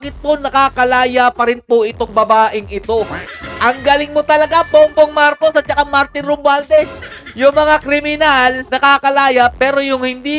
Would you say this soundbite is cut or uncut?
cut